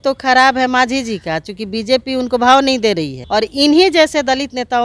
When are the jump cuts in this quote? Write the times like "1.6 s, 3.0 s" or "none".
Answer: 3.1 s